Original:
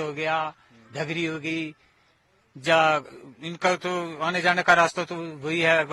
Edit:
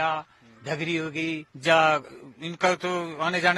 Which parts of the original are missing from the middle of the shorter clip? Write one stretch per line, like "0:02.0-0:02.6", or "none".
0:01.8-0:02.5